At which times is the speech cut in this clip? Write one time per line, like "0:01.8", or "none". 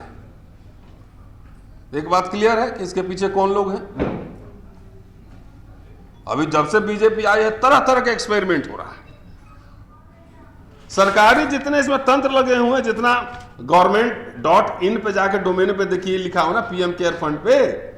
0:10.0